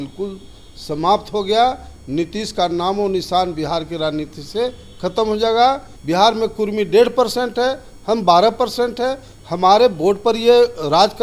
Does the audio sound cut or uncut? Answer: cut